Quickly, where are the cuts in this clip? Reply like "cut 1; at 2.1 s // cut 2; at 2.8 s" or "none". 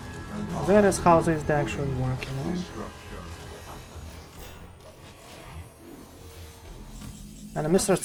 none

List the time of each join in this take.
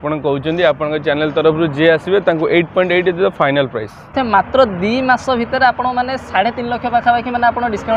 cut 1; at 4.1 s

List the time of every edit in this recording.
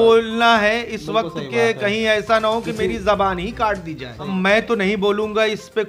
cut 1; at 4.3 s

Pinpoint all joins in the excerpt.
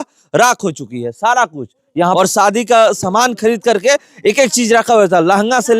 cut 1; at 2.1 s

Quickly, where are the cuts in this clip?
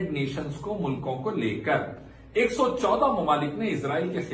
none

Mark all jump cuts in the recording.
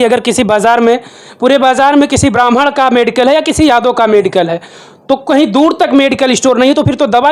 none

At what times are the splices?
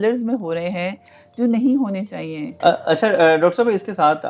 cut 1; at 2.4 s

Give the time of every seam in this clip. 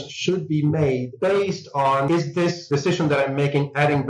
cut 1; at 2.3 s

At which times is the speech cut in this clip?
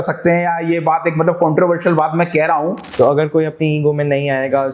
cut 1; at 2.8 s

